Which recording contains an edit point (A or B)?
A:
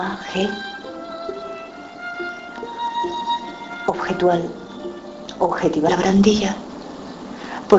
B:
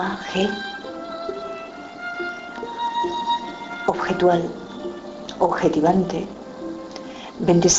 B